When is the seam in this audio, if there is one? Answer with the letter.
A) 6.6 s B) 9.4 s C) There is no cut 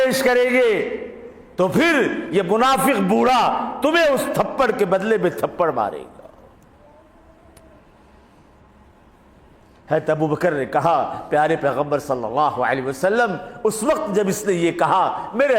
C